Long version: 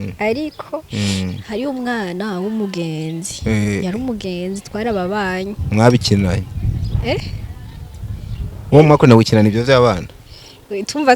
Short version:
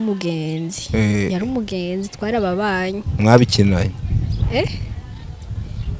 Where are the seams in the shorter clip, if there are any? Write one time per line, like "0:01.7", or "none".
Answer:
none

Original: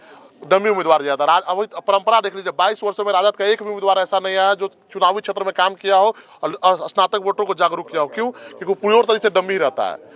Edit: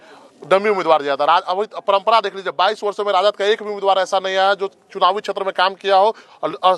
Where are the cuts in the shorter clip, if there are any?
none

